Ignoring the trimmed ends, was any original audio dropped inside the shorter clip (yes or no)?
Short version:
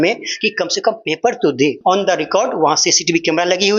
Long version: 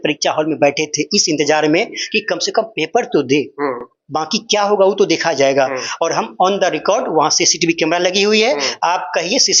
yes